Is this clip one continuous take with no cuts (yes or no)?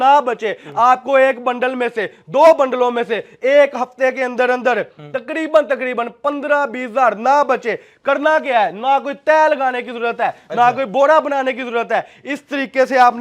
yes